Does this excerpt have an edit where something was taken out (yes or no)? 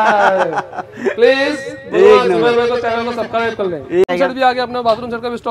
yes